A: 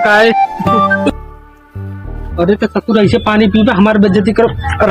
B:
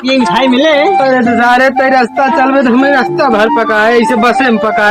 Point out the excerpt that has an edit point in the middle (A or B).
A